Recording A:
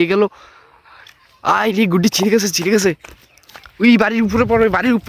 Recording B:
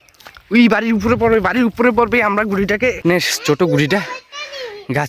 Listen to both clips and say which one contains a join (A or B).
B